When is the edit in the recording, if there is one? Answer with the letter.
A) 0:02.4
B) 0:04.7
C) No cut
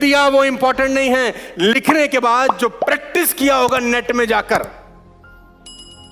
C